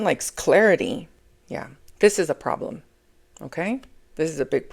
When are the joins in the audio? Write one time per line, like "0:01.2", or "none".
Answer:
0:01.1